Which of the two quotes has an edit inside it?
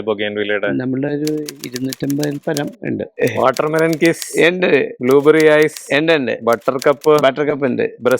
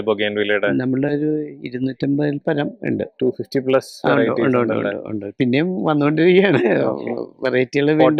first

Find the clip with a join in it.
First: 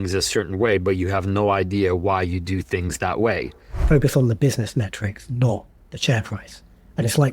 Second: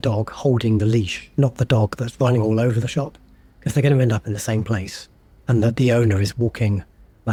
first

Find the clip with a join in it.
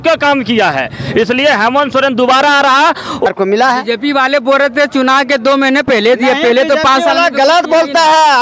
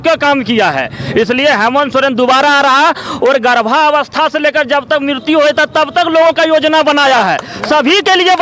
first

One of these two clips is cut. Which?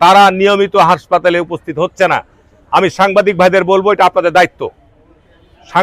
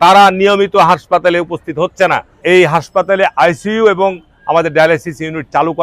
second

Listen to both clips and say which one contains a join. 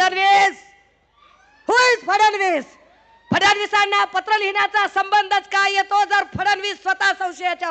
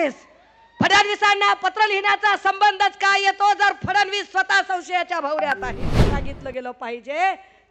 second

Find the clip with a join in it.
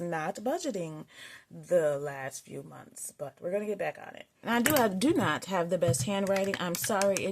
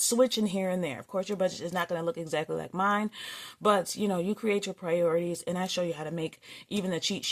first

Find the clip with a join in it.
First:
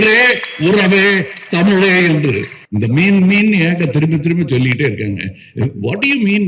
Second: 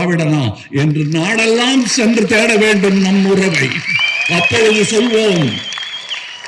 first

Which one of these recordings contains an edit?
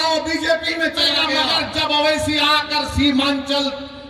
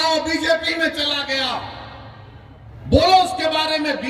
first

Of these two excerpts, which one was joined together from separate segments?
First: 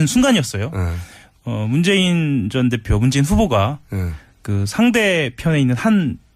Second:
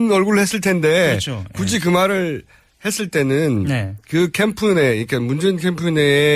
second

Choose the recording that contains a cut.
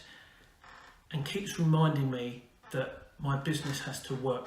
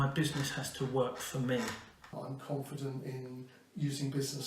second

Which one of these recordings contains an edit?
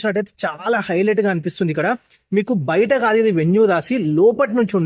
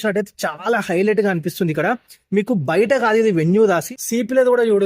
second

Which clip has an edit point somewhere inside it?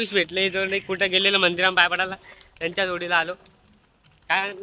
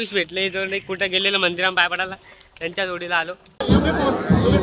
second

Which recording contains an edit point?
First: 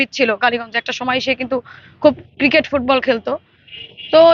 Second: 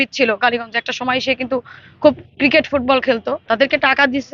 second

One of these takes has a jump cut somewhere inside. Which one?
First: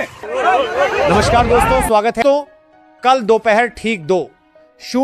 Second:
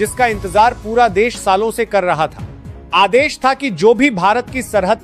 first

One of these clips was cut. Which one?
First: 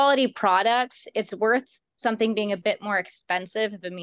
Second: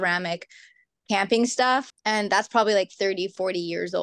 second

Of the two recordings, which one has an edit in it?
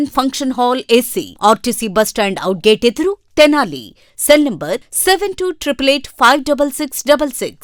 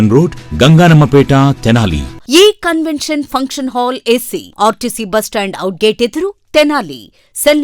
second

